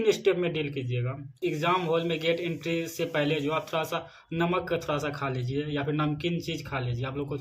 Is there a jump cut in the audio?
yes; 1 cut; at 1.4 s

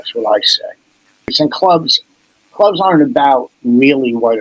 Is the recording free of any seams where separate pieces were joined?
no; 1 cut; at 1.3 s

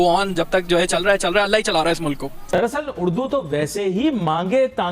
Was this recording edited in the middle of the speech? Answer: yes; 1 cut; at 2.3 s

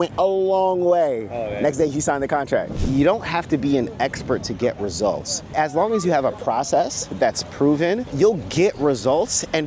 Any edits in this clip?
yes; 3 cuts; at 2.8 s, 5.5 s, 8.1 s

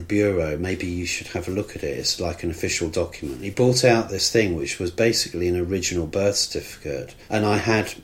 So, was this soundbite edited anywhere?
yes; 2 cuts; at 3.4 s, 7.1 s

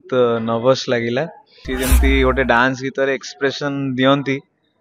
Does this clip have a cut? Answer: yes; 1 cut; at 1.6 s

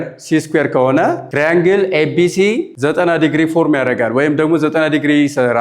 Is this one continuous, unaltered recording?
no; 2 cuts; at 1.2 s, 2.7 s

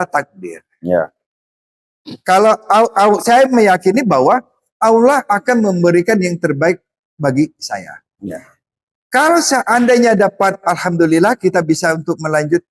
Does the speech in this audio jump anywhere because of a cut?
no; 0 cuts

